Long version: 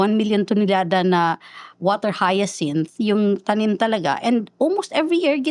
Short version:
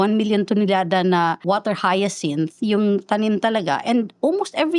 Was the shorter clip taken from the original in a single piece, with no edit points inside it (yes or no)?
no